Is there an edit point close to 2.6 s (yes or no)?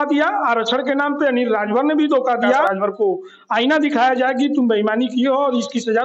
yes